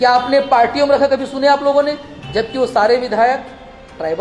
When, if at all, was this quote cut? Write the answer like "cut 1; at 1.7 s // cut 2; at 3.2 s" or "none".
none